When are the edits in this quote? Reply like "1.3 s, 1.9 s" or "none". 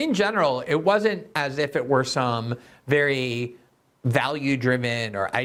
none